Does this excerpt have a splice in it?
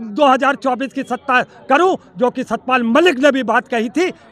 no; 0 cuts

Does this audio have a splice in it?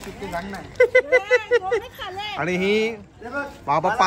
no; 0 cuts

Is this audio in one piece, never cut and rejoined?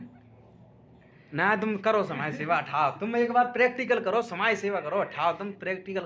yes; 0 cuts

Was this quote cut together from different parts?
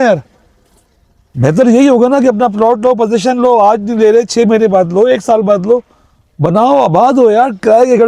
no; 0 cuts

